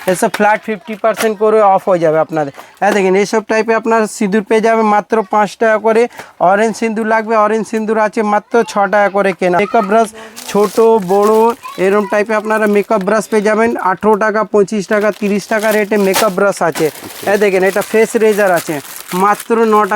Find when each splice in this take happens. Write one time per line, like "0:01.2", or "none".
0:09.6